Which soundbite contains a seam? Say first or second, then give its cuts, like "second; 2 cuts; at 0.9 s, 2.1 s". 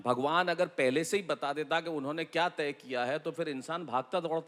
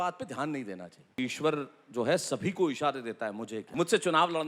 second; 2 cuts; at 1.2 s, 3.6 s